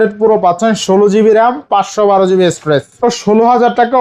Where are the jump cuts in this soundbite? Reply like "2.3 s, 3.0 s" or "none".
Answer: 3.0 s